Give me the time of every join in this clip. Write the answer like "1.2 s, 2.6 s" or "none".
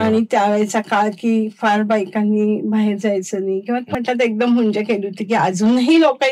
3.9 s

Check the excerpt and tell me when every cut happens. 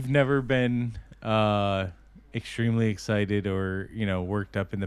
none

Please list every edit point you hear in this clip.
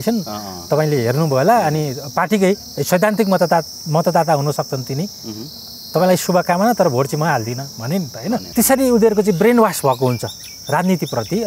8.5 s

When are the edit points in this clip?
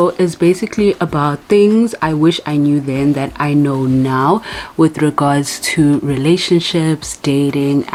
none

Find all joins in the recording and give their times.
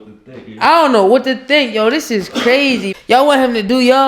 2.9 s

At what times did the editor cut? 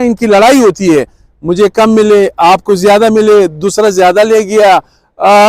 none

